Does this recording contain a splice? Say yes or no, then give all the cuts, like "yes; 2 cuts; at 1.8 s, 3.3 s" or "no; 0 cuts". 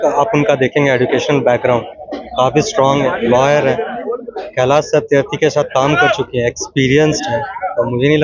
no; 0 cuts